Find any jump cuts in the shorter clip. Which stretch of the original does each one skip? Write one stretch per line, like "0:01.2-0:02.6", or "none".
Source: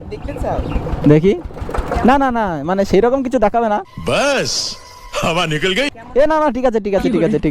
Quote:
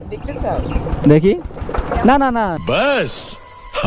0:02.6-0:04.0